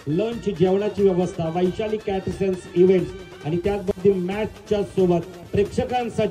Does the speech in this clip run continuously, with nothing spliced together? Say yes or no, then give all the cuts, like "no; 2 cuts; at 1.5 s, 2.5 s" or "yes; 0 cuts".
no; 1 cut; at 3.9 s